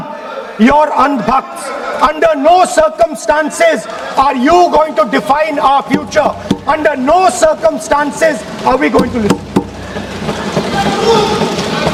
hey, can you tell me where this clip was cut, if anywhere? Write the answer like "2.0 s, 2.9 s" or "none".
none